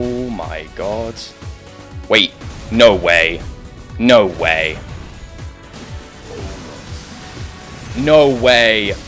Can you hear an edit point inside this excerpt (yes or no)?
no